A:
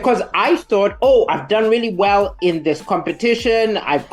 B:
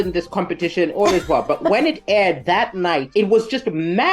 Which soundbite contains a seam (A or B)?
B